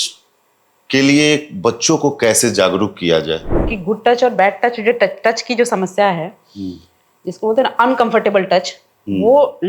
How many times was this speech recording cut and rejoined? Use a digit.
1